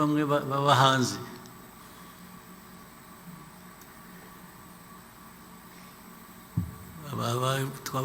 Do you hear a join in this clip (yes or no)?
no